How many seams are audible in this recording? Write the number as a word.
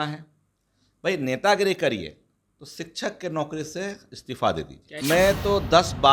one